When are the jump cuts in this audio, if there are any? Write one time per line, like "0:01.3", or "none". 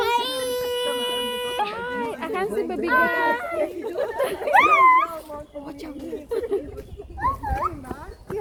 none